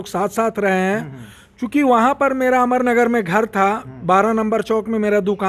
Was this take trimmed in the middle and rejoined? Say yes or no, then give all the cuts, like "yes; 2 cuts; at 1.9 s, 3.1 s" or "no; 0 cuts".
no; 0 cuts